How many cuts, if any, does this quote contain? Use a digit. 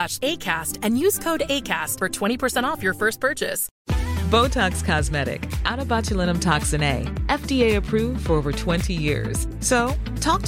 1